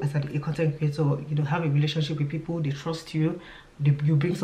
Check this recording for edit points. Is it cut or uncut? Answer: uncut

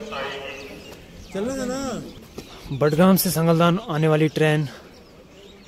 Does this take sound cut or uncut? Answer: cut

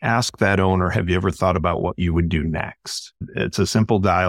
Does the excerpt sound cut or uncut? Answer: cut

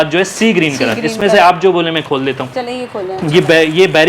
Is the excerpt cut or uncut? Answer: uncut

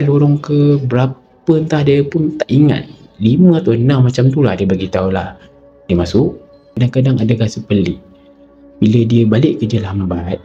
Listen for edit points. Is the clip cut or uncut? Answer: cut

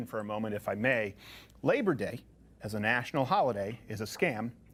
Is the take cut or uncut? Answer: uncut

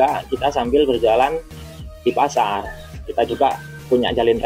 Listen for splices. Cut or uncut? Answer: uncut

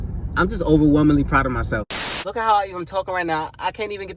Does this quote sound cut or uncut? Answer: cut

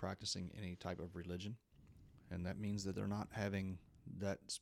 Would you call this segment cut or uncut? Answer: uncut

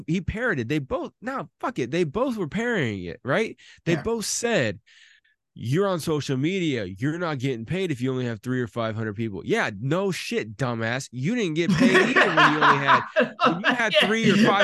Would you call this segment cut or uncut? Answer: uncut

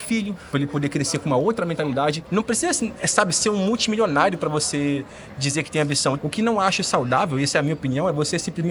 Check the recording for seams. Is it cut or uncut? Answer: cut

